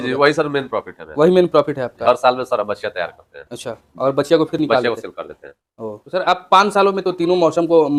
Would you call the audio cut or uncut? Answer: uncut